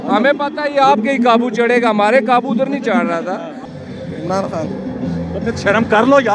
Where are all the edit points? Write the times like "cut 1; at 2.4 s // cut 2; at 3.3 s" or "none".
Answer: cut 1; at 3.6 s